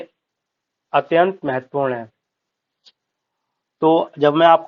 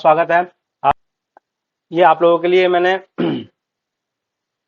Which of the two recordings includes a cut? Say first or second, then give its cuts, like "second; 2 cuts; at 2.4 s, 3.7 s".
second; 1 cut; at 1.0 s